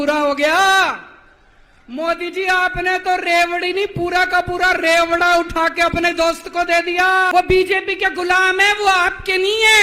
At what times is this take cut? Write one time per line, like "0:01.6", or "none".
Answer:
0:07.3